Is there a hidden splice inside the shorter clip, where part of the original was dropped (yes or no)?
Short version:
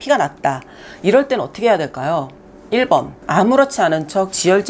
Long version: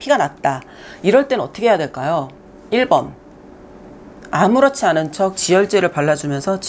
yes